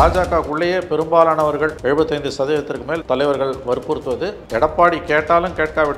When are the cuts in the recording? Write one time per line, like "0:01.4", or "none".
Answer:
0:01.8
0:03.0
0:04.4